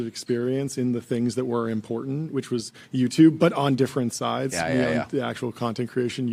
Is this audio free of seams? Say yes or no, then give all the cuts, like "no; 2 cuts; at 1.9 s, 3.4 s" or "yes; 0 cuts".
yes; 0 cuts